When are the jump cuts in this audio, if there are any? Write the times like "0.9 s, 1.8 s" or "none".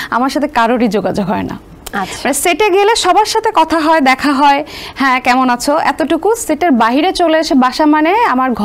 none

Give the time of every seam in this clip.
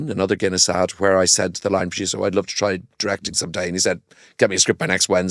none

